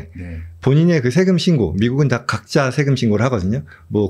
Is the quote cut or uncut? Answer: uncut